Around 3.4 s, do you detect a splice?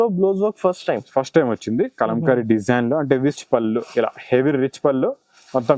yes; 1 cut; at 3.4 s

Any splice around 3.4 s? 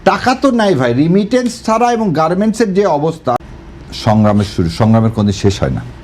yes; 1 cut; at 3.4 s

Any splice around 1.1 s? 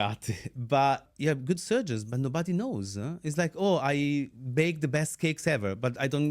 yes; 1 cut; at 1.1 s

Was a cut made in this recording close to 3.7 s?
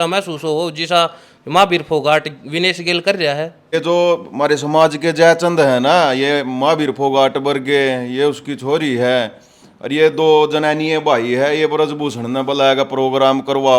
yes; 1 cut; at 3.7 s

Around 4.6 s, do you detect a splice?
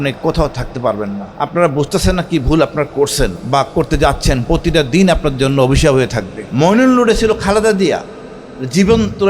no; 3 cuts; at 1.3 s, 3.4 s, 6.4 s

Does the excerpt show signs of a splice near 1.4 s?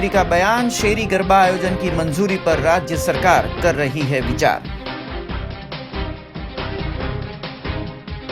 no; 0 cuts

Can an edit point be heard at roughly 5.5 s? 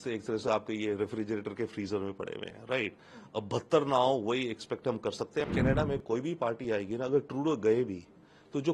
yes; 1 cut; at 5.5 s

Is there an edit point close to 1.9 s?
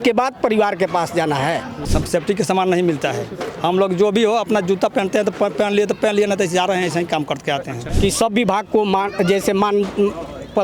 yes; 2 cuts; at 1.9 s, 7.8 s

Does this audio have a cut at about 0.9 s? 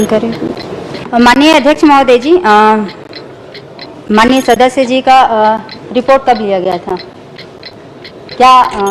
yes; 1 cut; at 0.9 s

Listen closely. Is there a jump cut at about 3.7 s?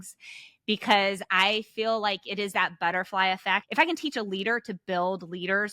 yes; 1 cut; at 3.7 s

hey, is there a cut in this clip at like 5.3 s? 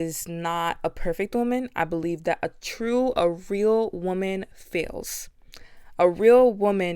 no; 0 cuts

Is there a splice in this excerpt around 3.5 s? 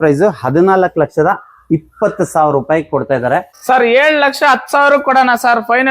yes; 1 cut; at 3.5 s

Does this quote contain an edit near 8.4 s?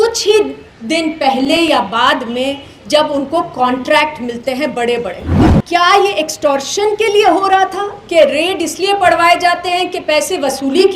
no; 1 cut; at 5.3 s

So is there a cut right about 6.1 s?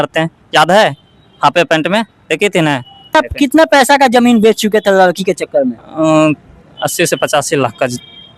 no; 1 cut; at 3.1 s

